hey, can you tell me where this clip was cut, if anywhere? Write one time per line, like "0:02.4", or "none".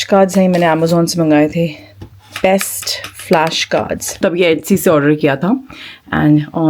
0:04.2